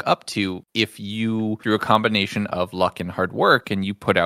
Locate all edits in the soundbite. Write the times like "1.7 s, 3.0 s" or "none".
none